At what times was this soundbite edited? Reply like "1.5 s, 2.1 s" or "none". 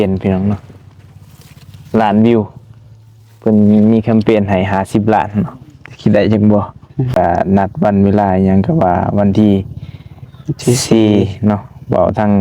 7.1 s